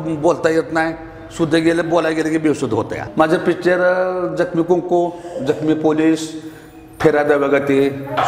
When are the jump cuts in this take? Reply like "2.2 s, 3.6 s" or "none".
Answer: 3.1 s